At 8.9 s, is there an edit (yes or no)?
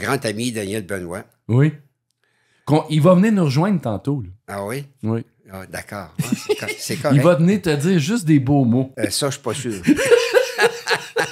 yes